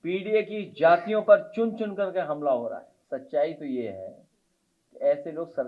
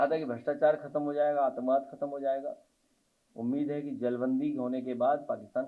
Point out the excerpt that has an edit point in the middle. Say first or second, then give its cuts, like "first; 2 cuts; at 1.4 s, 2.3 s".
first; 1 cut; at 2.9 s